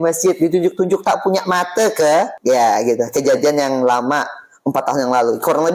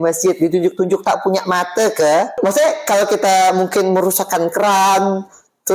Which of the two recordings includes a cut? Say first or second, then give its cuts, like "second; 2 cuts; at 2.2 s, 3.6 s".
second; 1 cut; at 2.3 s